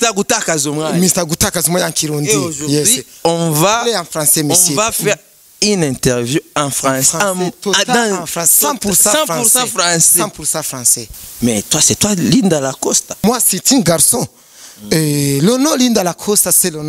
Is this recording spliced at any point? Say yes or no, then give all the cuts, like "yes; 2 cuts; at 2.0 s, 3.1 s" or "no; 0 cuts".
yes; 2 cuts; at 11.0 s, 13.2 s